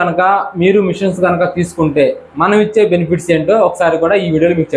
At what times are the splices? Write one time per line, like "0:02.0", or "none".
none